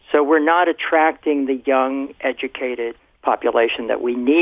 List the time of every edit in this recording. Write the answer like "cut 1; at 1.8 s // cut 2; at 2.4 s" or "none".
cut 1; at 3.0 s